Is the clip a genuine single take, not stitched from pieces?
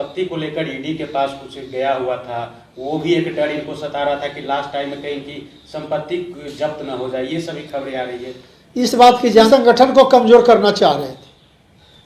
no; 1 cut; at 9.5 s

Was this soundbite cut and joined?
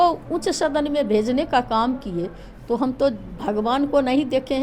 no; 0 cuts

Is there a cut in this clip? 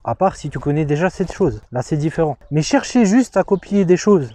no; 0 cuts

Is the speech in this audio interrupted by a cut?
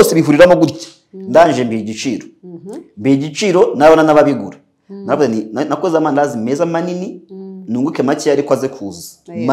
no; 0 cuts

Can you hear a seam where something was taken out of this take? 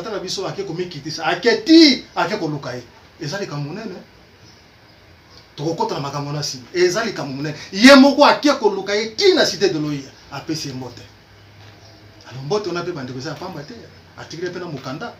no; 0 cuts

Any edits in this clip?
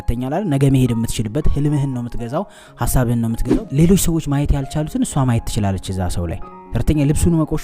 yes; 1 cut; at 3.5 s

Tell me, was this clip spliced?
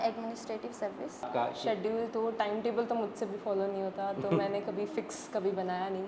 yes; 1 cut; at 1.3 s

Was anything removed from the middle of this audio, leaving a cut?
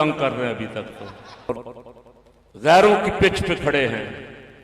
yes; 1 cut; at 1.5 s

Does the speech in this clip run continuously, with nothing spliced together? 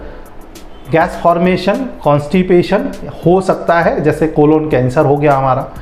yes; 0 cuts

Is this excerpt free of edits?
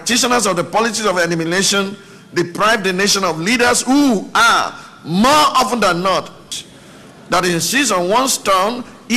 no; 1 cut; at 6.4 s

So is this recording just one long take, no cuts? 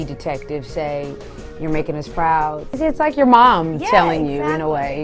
no; 1 cut; at 2.8 s

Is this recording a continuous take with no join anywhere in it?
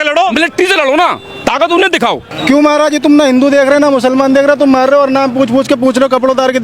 no; 1 cut; at 2.3 s

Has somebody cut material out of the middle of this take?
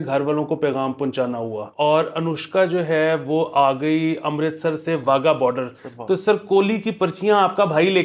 yes; 1 cut; at 1.6 s

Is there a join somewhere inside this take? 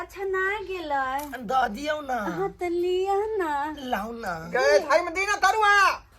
no; 0 cuts

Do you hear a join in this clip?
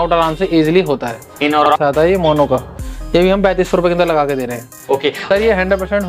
yes; 2 cuts; at 1.7 s, 5.2 s

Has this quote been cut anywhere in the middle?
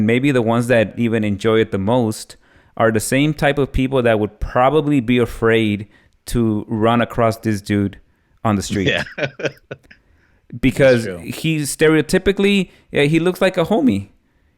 yes; 1 cut; at 0.9 s

